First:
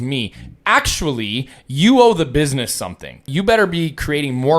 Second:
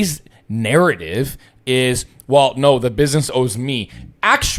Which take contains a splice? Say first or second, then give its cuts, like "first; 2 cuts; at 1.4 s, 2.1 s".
first; 1 cut; at 3.3 s